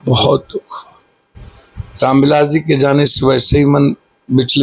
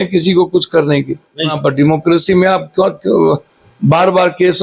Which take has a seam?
second; 1 cut; at 1.5 s

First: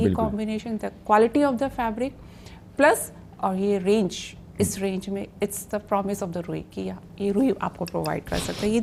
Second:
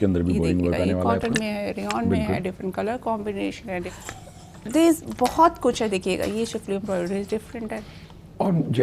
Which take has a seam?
second; 1 cut; at 4.0 s

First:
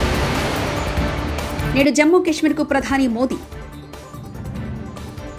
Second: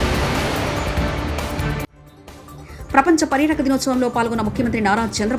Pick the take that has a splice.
second; 1 cut; at 1.7 s

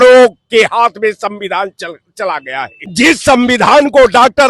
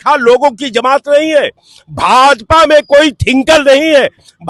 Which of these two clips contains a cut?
first; 1 cut; at 2.8 s

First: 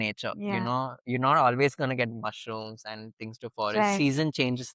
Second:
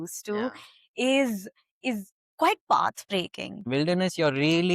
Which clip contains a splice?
second; 2 cuts; at 2.2 s, 3.6 s

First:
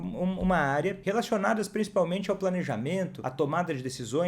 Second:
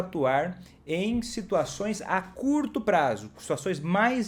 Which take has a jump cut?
first; 2 cuts; at 1.0 s, 3.2 s

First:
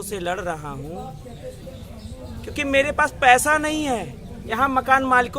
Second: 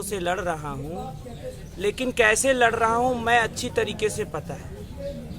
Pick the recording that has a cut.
first; 1 cut; at 1.6 s

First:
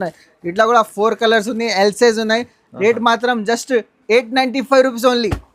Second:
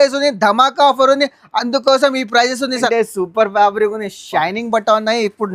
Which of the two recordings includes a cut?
second; 1 cut; at 2.8 s

